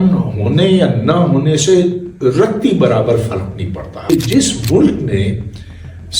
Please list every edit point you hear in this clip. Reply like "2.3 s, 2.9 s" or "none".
4.1 s